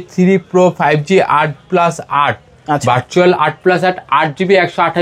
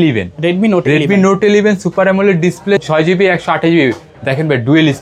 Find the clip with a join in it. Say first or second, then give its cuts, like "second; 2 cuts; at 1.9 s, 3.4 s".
second; 1 cut; at 2.8 s